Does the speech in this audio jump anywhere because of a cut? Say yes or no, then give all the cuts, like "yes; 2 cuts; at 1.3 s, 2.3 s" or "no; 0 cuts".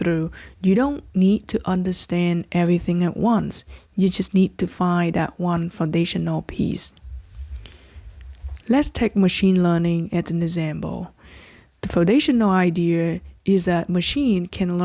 no; 0 cuts